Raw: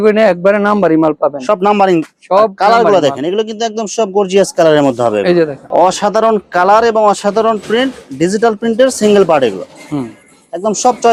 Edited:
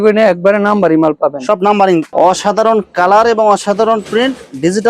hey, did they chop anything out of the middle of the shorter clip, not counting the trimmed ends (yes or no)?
yes